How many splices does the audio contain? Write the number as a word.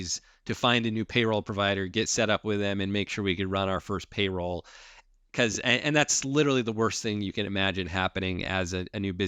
zero